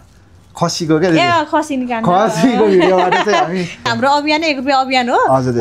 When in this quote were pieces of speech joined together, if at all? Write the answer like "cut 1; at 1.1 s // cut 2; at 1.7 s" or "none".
cut 1; at 3.8 s